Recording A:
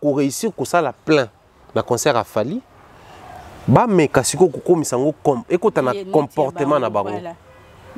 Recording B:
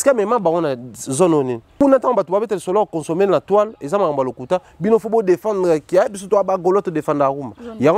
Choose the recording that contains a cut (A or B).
B